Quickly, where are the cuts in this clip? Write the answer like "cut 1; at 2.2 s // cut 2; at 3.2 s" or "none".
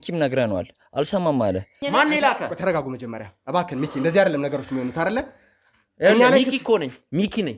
cut 1; at 1.7 s